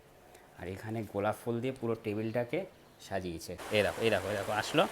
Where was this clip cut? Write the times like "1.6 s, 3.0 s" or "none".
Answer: 3.6 s